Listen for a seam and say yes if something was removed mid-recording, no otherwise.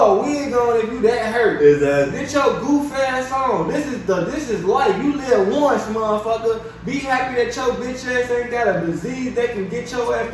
no